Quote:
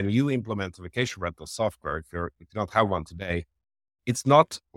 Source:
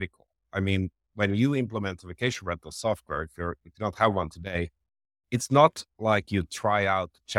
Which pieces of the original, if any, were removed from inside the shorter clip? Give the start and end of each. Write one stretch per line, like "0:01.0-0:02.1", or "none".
none

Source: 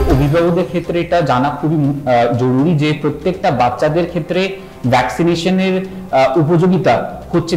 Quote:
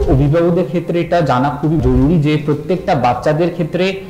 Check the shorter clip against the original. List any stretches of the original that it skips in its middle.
0:01.8-0:02.4

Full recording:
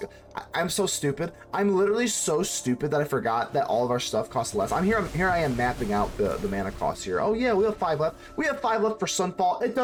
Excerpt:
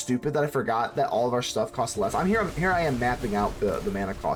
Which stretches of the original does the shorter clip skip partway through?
none

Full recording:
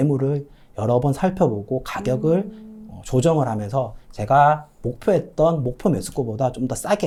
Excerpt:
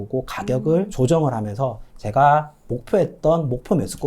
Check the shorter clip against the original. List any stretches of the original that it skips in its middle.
0:02.5-0:03.0

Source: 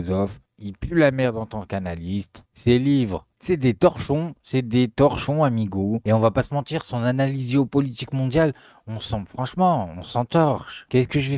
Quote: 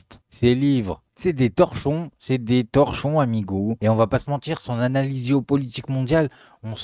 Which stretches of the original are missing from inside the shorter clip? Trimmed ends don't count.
none

